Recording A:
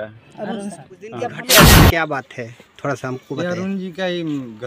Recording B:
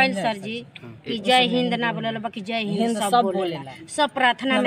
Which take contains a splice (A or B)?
A